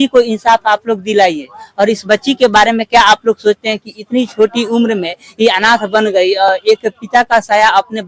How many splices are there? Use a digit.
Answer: 0